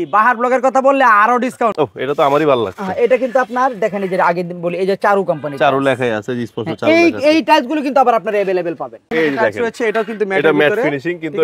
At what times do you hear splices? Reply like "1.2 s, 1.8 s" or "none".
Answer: 1.7 s, 9.0 s